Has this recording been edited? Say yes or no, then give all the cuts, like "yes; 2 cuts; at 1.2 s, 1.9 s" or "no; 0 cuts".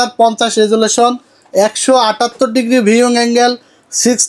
no; 0 cuts